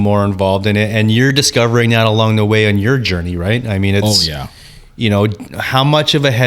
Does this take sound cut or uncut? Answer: cut